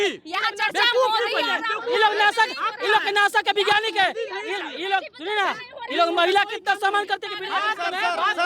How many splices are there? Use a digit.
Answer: 0